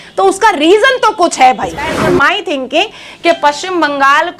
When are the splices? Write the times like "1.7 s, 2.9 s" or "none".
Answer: 2.0 s